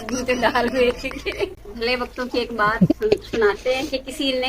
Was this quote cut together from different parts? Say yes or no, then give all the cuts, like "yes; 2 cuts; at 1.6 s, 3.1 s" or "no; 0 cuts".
no; 0 cuts